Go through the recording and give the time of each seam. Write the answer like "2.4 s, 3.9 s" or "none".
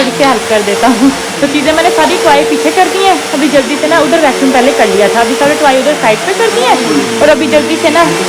none